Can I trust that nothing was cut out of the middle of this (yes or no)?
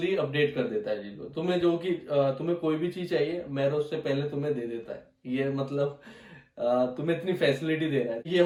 yes